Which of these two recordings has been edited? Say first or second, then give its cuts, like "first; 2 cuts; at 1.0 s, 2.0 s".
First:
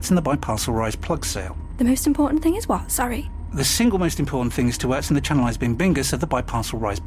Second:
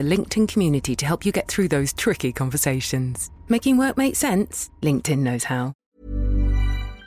second; 1 cut; at 5.7 s